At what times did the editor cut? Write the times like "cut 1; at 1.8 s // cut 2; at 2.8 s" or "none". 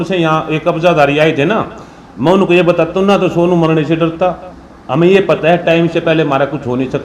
none